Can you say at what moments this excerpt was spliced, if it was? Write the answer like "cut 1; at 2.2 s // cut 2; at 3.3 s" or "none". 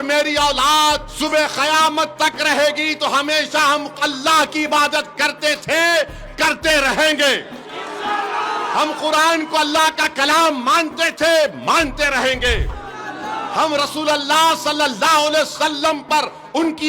cut 1; at 1.1 s